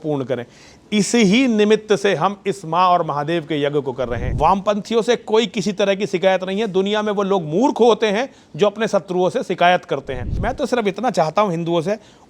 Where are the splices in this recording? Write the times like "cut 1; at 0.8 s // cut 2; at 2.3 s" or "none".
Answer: cut 1; at 4.2 s // cut 2; at 10.4 s